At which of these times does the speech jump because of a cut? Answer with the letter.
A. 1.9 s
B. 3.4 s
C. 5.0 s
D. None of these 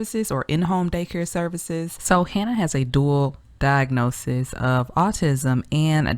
A